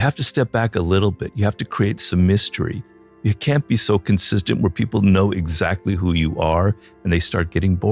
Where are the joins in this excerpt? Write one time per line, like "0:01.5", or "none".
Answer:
none